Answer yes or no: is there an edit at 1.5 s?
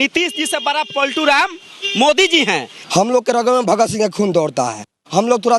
no